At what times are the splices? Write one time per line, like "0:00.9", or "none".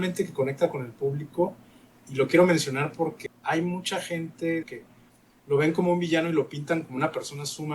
0:03.2
0:04.7